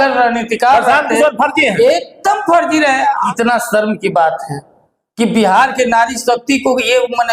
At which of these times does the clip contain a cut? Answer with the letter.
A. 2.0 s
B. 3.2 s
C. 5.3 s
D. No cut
B